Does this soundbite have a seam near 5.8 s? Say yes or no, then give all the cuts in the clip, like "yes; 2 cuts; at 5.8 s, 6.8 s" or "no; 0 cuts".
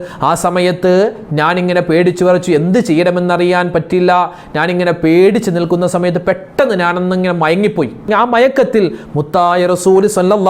no; 1 cut; at 8.1 s